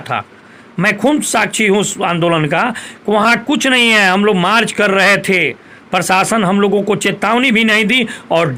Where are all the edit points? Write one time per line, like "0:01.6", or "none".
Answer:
none